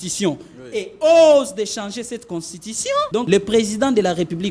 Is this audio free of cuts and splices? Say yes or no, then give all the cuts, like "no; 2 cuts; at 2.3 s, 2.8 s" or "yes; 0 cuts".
no; 1 cut; at 3.2 s